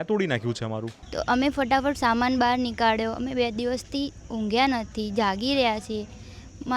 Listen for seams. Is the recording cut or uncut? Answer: cut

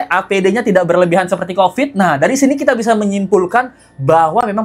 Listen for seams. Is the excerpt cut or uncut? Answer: uncut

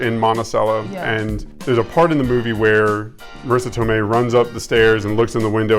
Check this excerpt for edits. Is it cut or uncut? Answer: cut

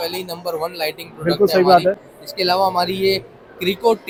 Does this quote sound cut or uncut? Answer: uncut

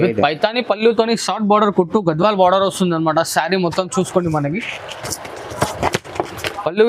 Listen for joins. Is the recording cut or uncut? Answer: uncut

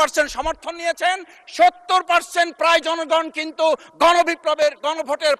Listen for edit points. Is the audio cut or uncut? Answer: uncut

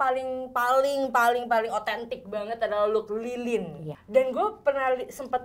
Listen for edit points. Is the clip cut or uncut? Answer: cut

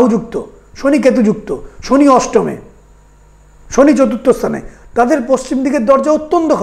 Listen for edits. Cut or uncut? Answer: uncut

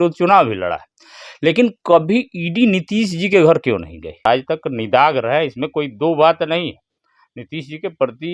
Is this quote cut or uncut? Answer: cut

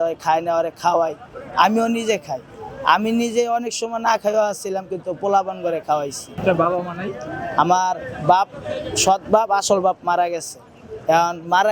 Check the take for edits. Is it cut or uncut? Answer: uncut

